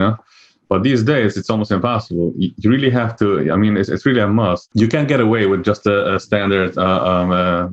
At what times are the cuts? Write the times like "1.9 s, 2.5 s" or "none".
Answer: 4.7 s